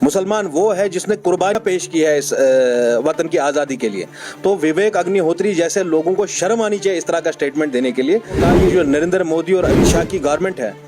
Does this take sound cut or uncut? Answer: cut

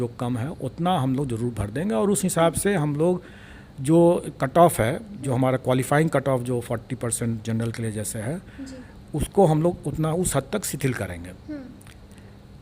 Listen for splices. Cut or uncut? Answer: uncut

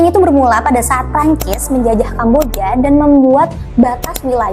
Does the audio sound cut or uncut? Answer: uncut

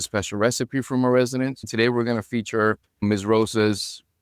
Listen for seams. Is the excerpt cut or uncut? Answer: cut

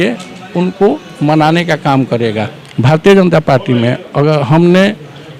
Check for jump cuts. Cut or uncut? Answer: cut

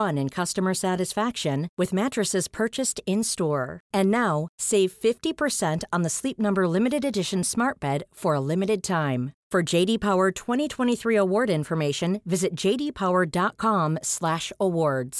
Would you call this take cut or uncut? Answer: uncut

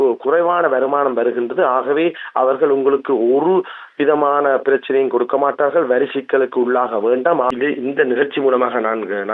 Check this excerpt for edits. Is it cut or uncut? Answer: cut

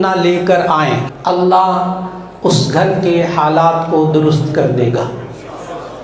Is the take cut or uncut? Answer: cut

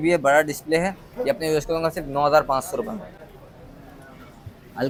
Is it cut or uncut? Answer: uncut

